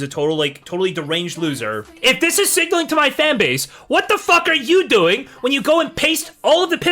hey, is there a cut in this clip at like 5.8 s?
no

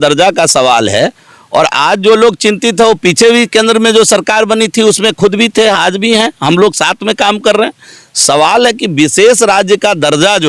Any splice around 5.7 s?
no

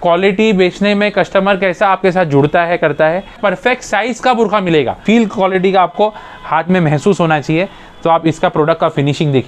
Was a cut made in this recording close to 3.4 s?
yes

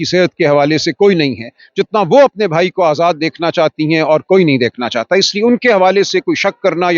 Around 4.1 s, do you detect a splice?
no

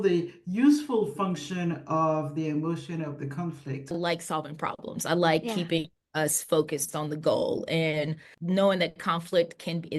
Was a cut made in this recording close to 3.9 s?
yes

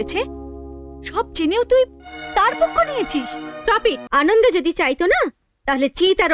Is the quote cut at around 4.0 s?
yes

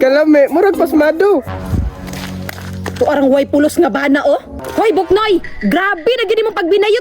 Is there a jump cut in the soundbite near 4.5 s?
yes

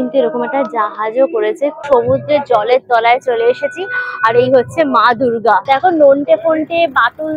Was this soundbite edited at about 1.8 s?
yes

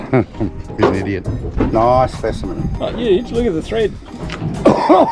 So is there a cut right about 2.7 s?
yes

